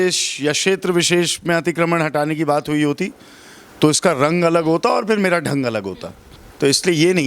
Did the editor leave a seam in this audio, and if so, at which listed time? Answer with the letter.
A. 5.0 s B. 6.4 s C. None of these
C